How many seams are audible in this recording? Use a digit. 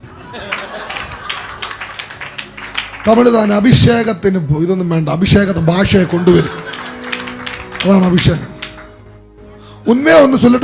0